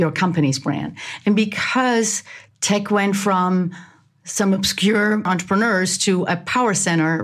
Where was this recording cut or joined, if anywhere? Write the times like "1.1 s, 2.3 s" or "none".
5.3 s